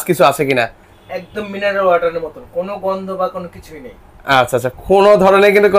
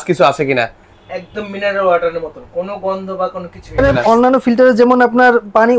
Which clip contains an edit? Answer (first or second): second